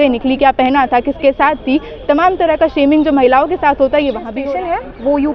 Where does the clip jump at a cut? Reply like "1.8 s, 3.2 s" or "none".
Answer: 4.3 s